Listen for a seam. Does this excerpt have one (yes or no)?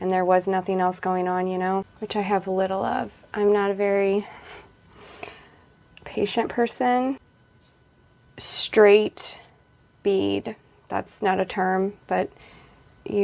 yes